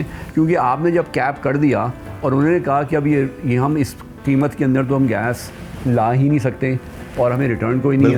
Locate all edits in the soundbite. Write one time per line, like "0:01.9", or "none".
none